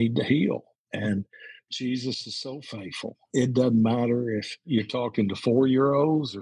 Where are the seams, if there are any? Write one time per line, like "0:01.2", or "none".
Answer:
0:03.3
0:04.6